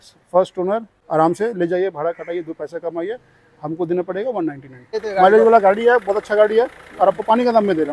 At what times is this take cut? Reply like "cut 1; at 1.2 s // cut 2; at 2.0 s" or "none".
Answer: cut 1; at 0.9 s // cut 2; at 4.9 s